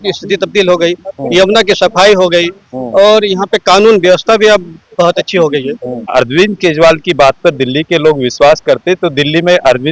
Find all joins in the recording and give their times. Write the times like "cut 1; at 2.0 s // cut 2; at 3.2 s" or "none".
cut 1; at 6.0 s